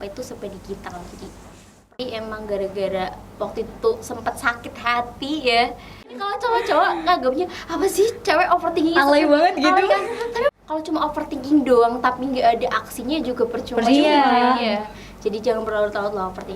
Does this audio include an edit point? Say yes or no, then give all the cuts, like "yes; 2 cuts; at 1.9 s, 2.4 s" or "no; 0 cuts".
yes; 3 cuts; at 1.9 s, 6.2 s, 10.5 s